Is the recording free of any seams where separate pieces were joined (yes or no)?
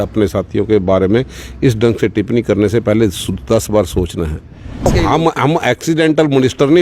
no